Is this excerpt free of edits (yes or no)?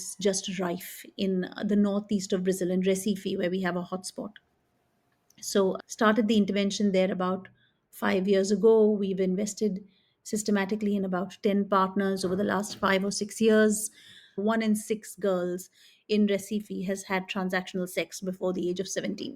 no